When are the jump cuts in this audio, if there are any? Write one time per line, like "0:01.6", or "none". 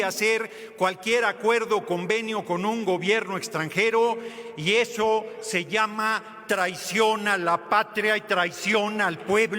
none